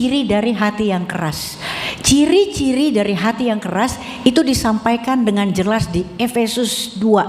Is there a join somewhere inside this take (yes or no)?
no